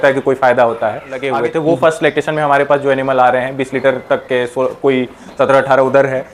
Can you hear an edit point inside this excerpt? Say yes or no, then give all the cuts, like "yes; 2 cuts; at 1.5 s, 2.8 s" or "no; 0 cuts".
yes; 1 cut; at 1.3 s